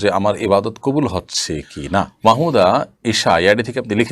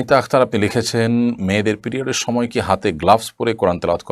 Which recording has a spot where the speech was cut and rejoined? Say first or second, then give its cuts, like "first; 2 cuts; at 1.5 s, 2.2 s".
first; 1 cut; at 2.1 s